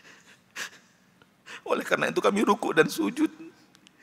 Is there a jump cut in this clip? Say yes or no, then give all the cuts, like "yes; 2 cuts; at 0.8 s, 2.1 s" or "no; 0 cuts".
no; 0 cuts